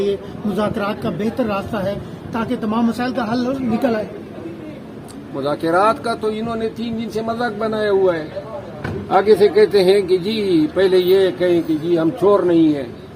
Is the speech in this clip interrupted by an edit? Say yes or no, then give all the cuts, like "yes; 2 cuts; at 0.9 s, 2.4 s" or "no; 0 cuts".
no; 0 cuts